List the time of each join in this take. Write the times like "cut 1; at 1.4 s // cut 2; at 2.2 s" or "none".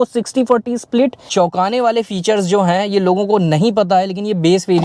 cut 1; at 1.2 s